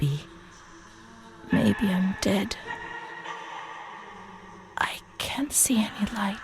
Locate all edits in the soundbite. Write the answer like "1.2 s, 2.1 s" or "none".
2.6 s, 4.7 s